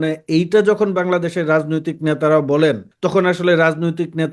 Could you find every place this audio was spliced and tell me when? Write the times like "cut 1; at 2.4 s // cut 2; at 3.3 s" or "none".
cut 1; at 2.9 s